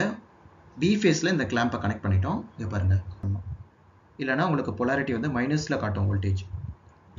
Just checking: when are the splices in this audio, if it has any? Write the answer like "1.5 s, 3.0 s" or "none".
3.2 s